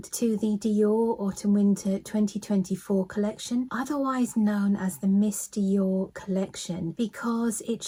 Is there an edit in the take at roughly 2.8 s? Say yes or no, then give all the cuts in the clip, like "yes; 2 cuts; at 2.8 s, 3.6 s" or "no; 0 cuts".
no; 0 cuts